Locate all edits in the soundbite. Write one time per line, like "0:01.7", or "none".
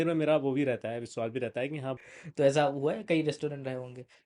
0:02.1